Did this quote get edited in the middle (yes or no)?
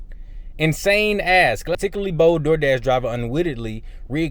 yes